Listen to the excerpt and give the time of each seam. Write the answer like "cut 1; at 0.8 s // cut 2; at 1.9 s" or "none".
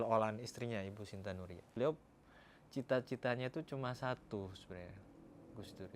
cut 1; at 1.6 s